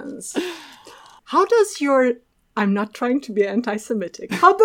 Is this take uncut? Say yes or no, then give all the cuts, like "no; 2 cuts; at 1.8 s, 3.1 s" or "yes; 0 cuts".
no; 1 cut; at 1.1 s